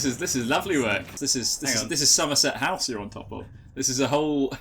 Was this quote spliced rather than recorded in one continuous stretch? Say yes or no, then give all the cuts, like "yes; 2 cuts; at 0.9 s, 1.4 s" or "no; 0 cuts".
yes; 1 cut; at 1.1 s